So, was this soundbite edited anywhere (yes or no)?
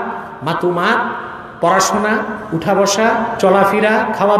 no